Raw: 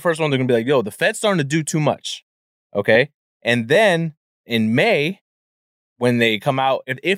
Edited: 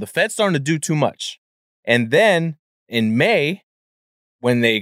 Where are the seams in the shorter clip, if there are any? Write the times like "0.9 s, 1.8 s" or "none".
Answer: 1.7 s